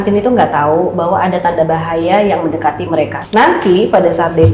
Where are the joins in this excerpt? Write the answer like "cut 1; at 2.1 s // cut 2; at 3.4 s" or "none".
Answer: cut 1; at 3.2 s